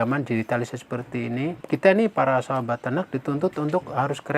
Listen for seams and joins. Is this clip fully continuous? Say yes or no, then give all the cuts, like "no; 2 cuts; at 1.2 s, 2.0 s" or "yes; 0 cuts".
no; 1 cut; at 1.6 s